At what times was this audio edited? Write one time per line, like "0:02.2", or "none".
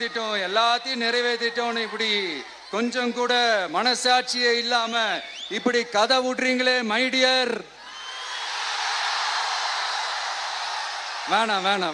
none